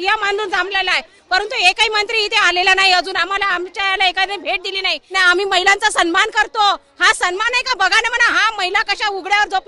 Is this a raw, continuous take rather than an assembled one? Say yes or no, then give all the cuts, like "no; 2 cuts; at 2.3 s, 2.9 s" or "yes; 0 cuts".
no; 1 cut; at 5.1 s